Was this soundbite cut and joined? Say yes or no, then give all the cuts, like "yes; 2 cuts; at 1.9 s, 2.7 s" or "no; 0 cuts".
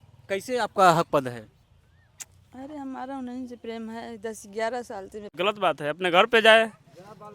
yes; 1 cut; at 5.3 s